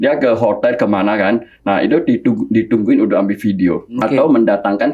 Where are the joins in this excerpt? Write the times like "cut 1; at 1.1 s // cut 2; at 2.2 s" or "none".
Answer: cut 1; at 3.9 s